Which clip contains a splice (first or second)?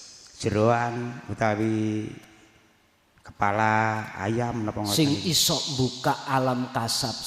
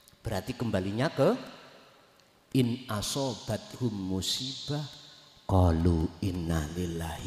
first